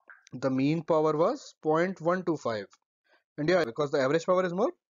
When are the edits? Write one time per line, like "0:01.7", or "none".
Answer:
0:03.7